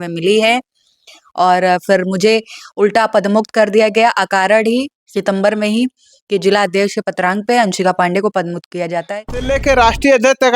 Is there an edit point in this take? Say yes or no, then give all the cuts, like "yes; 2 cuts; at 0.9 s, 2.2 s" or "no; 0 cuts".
yes; 1 cut; at 9.5 s